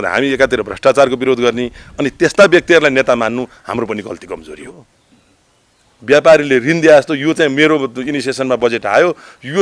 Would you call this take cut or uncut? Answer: cut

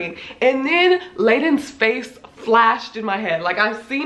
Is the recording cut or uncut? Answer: uncut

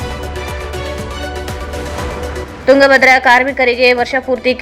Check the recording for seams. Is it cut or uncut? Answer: uncut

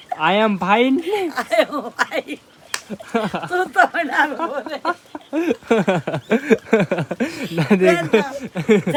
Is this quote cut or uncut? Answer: uncut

